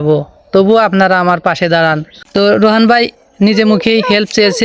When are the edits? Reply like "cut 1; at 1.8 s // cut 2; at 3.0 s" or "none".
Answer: cut 1; at 2.1 s